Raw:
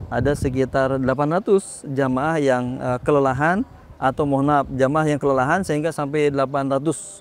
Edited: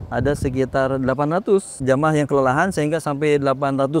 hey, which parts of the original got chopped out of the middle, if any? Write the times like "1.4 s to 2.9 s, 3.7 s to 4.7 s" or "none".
1.8 s to 4.7 s